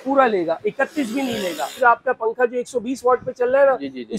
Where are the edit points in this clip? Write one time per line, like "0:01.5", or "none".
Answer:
0:01.8